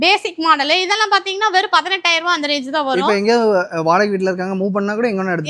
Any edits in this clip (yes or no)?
no